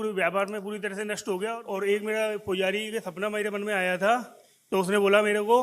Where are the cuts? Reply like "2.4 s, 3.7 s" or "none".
1.6 s